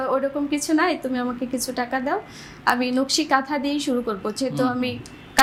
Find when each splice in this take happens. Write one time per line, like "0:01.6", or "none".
none